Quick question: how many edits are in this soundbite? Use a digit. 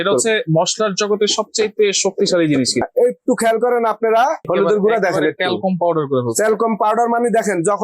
2